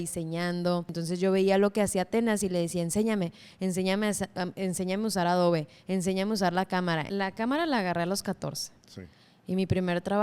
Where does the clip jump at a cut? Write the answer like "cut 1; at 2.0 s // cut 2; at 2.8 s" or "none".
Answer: cut 1; at 1.0 s // cut 2; at 7.1 s

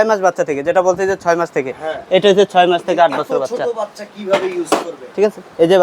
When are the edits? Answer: none

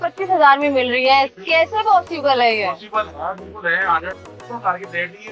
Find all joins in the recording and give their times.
cut 1; at 4.1 s

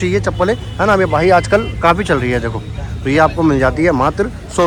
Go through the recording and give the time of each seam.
none

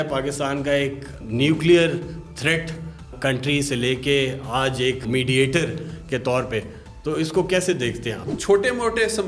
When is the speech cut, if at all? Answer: cut 1; at 1.2 s // cut 2; at 3.1 s // cut 3; at 5.0 s // cut 4; at 8.3 s

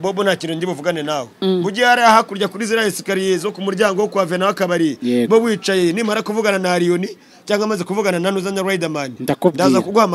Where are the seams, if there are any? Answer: none

